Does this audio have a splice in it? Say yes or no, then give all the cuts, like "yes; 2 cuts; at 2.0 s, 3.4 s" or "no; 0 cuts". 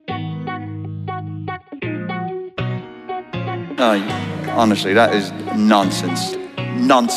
no; 0 cuts